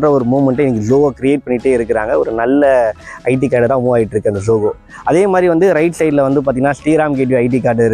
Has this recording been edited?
no; 0 cuts

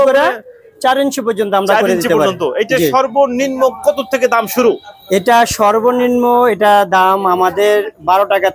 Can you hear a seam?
no; 0 cuts

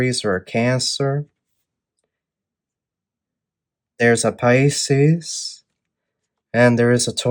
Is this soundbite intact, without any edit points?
yes; 0 cuts

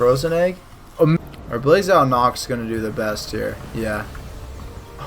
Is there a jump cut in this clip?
yes; 1 cut; at 1.2 s

